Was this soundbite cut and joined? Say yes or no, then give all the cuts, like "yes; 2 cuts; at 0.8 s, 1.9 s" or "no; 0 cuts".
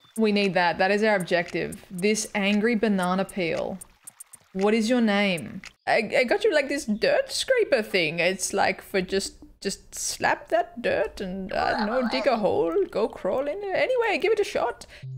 yes; 1 cut; at 5.7 s